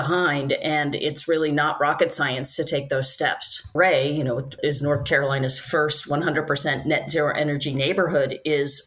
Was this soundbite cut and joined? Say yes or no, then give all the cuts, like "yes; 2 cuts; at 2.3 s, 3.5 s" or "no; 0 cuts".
yes; 2 cuts; at 3.7 s, 4.6 s